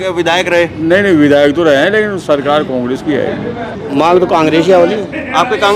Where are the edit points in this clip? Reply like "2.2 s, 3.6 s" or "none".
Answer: 3.7 s